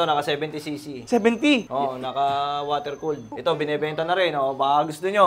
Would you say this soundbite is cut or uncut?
cut